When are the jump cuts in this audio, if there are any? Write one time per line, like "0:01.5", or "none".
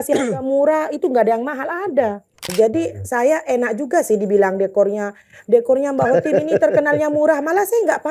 0:02.5